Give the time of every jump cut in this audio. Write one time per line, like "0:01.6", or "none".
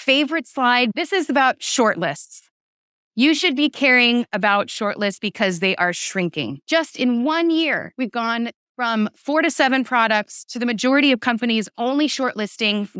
0:00.9
0:06.6
0:07.9